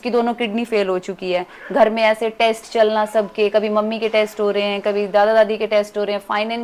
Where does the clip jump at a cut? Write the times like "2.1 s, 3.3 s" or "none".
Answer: none